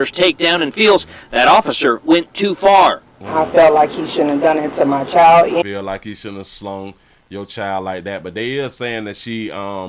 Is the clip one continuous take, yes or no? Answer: yes